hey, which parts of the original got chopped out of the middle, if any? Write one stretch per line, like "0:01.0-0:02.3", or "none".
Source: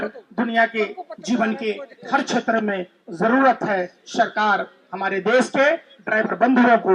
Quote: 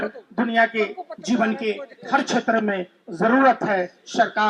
none